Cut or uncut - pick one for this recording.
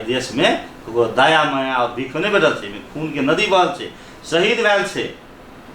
uncut